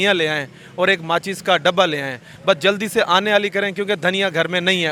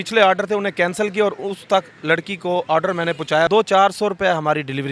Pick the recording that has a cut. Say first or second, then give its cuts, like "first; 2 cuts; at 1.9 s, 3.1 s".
second; 1 cut; at 3.5 s